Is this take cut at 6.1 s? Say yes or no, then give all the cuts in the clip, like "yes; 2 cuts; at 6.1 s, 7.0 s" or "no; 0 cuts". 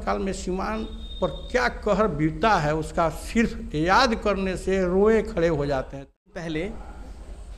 yes; 1 cut; at 6.1 s